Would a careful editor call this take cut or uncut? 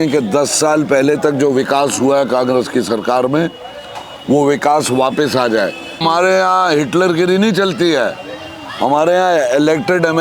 cut